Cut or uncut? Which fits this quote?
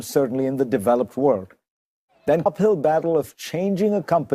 uncut